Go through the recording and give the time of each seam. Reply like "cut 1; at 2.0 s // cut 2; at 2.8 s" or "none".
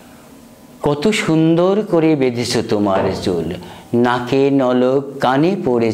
none